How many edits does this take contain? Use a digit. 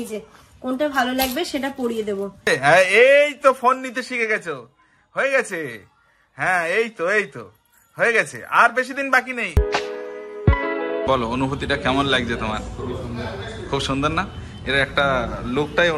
2